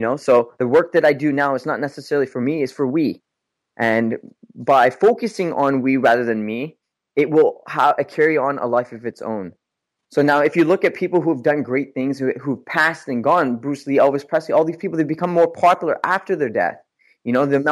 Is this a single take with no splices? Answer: yes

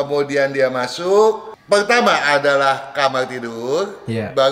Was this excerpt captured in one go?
no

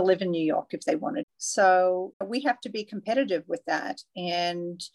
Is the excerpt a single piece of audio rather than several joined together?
no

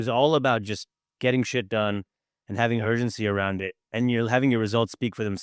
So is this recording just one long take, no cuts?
yes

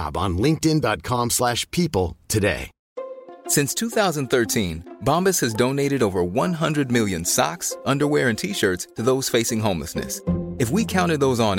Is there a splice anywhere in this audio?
no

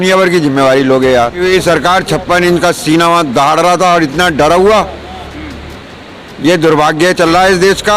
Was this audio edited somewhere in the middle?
yes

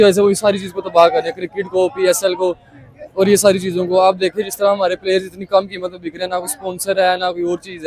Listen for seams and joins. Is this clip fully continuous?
yes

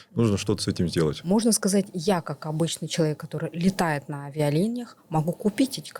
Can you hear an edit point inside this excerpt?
yes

